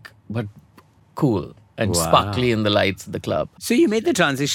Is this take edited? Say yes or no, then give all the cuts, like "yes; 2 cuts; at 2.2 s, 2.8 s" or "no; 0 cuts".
yes; 1 cut; at 3.5 s